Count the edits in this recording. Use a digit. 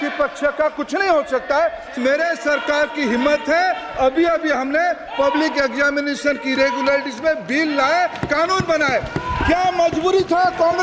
1